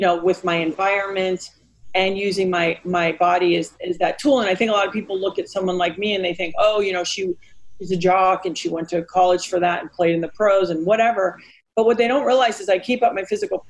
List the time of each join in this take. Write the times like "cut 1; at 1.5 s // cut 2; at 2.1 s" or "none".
none